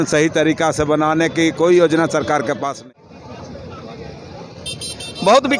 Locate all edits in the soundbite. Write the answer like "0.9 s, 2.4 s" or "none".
2.7 s